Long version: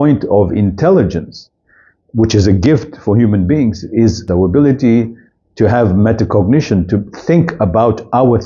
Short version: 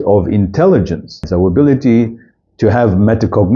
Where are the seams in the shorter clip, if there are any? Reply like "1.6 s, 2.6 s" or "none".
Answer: 1.2 s